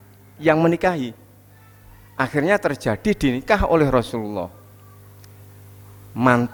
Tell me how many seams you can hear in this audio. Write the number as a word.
zero